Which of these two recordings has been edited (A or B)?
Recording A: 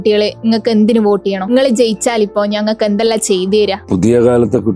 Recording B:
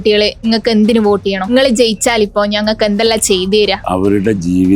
B